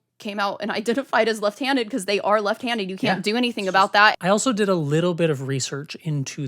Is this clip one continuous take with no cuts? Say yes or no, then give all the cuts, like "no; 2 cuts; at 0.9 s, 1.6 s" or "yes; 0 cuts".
no; 1 cut; at 4.2 s